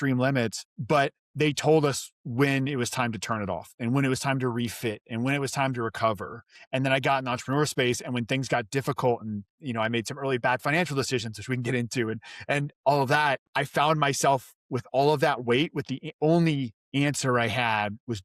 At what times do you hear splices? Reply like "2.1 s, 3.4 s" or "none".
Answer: 13.5 s